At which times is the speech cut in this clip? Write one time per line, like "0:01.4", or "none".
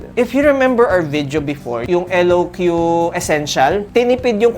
0:01.8